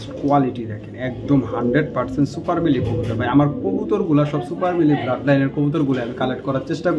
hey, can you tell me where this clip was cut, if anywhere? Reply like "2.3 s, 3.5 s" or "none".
none